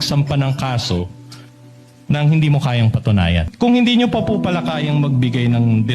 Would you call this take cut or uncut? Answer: cut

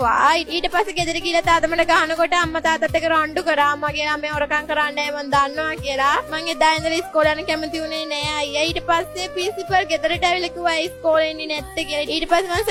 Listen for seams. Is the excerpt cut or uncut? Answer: uncut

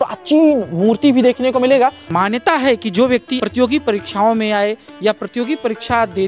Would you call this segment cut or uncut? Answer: cut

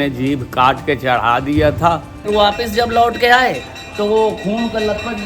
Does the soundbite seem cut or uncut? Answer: cut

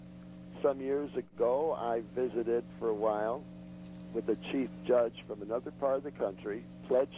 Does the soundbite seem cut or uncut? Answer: uncut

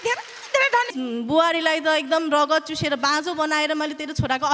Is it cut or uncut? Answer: cut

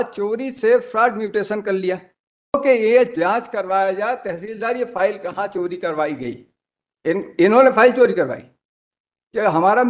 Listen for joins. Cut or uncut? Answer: cut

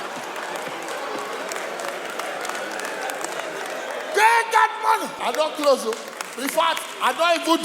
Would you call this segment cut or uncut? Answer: cut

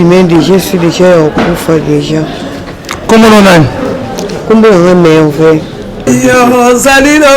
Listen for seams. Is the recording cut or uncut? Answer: cut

